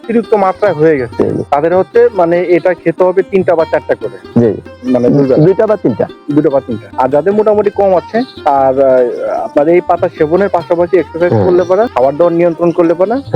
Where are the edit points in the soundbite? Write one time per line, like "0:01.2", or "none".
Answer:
0:01.4
0:06.8
0:08.3
0:11.9